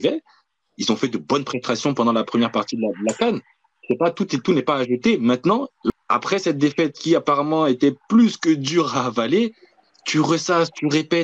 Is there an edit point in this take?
yes; 1 cut; at 5.9 s

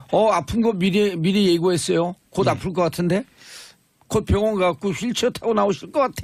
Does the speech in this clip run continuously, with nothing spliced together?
yes; 0 cuts

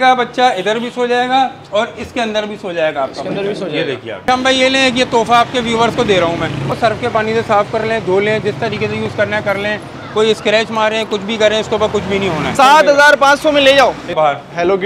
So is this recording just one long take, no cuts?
no; 4 cuts; at 4.2 s, 6.7 s, 12.5 s, 14.1 s

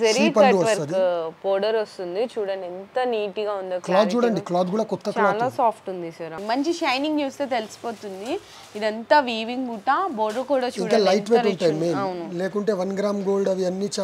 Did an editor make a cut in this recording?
yes; 1 cut; at 6.4 s

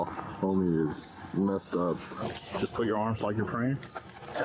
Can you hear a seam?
yes; 1 cut; at 2.2 s

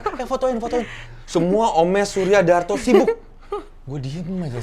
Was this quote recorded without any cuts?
yes; 0 cuts

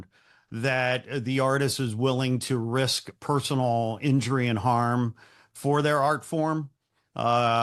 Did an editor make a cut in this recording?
no; 0 cuts

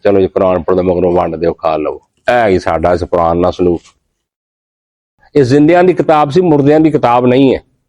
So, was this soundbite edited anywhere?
yes; 1 cut; at 5.1 s

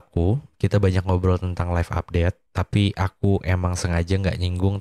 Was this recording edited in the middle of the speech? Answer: yes; 1 cut; at 2.4 s

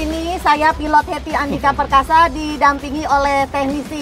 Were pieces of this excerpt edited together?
no; 0 cuts

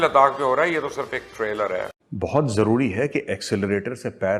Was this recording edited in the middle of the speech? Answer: no; 0 cuts

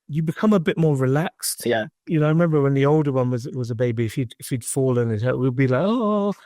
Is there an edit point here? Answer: yes; 1 cut; at 2.0 s

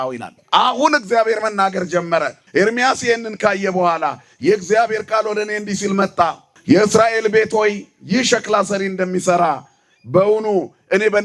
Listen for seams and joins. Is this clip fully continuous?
no; 2 cuts; at 2.4 s, 6.5 s

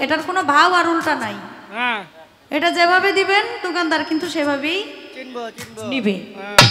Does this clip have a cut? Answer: no; 0 cuts

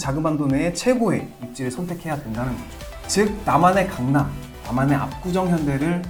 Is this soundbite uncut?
yes; 0 cuts

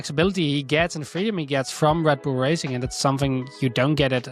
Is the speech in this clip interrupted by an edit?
no; 0 cuts

